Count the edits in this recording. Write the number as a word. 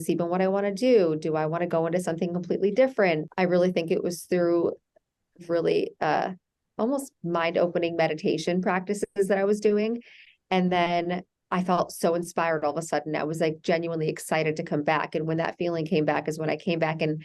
one